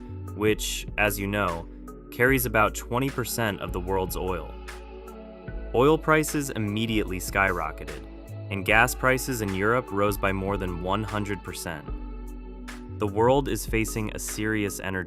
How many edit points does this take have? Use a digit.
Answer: 2